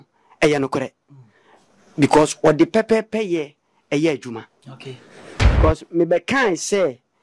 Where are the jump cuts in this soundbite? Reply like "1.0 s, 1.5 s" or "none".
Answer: 5.5 s